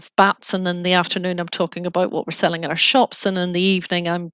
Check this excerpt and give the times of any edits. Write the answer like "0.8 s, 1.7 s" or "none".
none